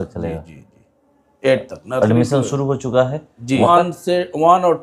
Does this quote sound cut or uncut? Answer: cut